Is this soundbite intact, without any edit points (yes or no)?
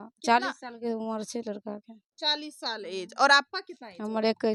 yes